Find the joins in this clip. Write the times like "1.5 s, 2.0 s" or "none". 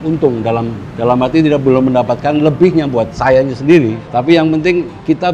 3.2 s